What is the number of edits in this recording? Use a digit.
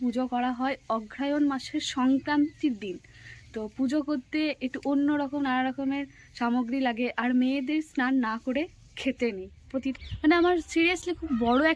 1